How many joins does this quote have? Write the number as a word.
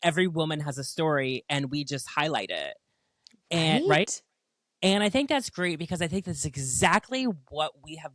zero